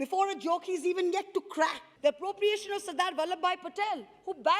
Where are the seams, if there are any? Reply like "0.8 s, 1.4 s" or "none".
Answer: 1.9 s